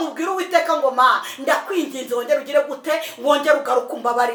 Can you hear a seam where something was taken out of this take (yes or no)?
no